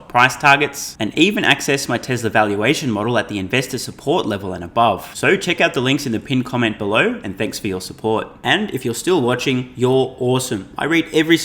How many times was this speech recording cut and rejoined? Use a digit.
0